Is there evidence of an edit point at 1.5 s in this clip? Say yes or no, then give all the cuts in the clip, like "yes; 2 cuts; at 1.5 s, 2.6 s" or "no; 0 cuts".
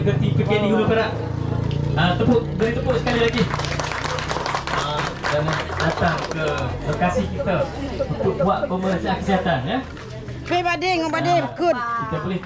no; 0 cuts